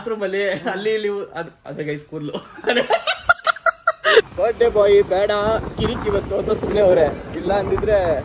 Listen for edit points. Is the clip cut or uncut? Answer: cut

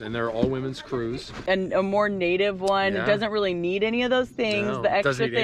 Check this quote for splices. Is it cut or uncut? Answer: cut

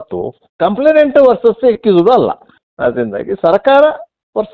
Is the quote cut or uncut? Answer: cut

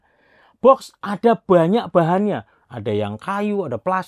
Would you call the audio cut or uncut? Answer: uncut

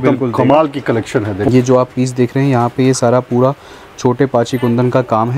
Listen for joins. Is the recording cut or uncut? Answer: cut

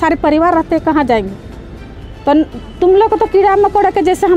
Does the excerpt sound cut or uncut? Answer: uncut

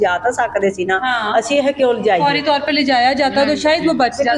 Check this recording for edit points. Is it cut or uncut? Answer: uncut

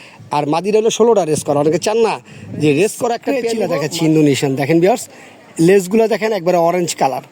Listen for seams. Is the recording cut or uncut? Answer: cut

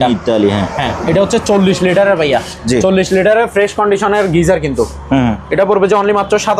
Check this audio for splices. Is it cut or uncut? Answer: uncut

